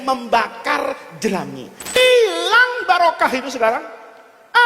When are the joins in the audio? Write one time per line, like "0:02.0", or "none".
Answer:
0:02.0